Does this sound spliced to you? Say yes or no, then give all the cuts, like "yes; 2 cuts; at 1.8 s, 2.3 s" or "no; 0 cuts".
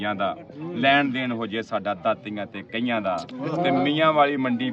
no; 0 cuts